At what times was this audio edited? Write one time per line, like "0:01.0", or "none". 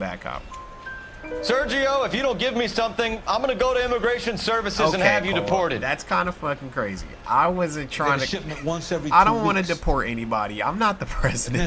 none